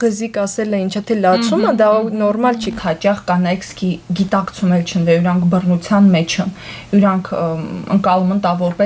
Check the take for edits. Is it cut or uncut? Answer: cut